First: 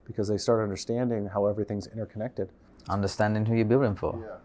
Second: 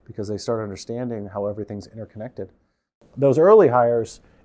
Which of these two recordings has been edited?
second; 1 cut; at 3.1 s

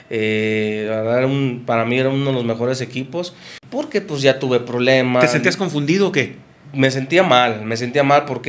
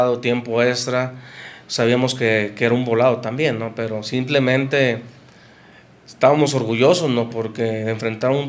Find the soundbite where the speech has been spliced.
first; 1 cut; at 3.6 s

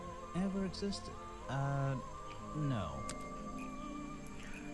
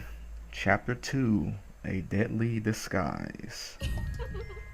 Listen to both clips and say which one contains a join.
first; 1 cut; at 2.4 s

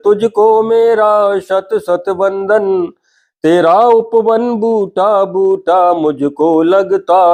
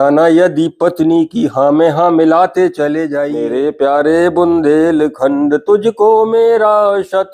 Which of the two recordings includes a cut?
second; 1 cut; at 3.4 s

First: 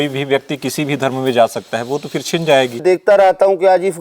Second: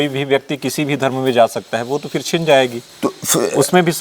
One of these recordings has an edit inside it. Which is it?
first; 1 cut; at 2.8 s

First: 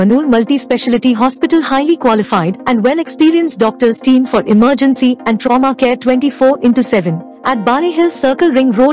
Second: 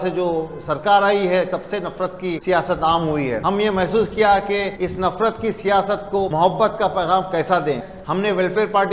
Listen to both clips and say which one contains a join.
second; 5 cuts; at 2.4 s, 3.4 s, 4.7 s, 6.3 s, 7.9 s

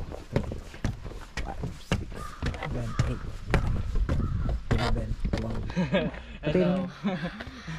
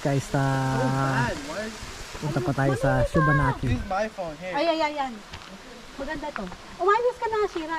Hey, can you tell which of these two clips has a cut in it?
first; 1 cut; at 5.6 s

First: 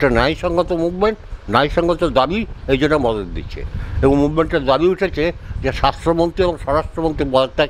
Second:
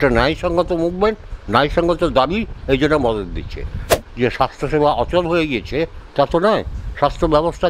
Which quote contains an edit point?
second; 1 cut; at 3.9 s

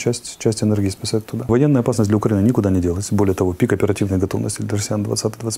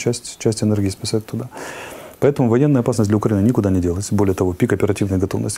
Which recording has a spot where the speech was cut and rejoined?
first; 1 cut; at 1.5 s

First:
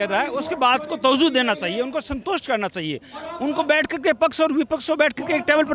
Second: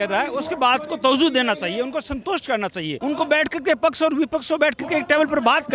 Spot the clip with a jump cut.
second; 1 cut; at 3.0 s

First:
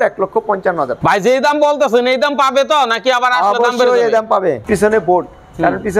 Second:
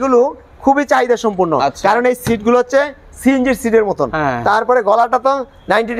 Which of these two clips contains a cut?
first; 2 cuts; at 0.9 s, 4.6 s

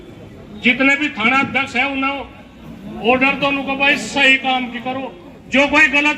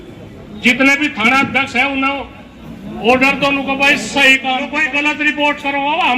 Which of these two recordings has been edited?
second; 1 cut; at 4.9 s

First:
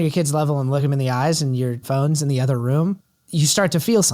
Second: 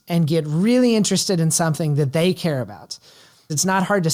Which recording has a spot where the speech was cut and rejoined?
first; 3 cuts; at 0.8 s, 1.8 s, 3.1 s

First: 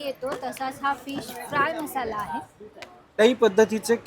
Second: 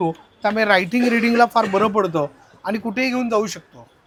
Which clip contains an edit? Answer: first; 1 cut; at 3.1 s

